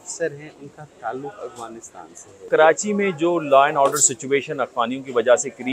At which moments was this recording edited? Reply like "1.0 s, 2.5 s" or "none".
2.5 s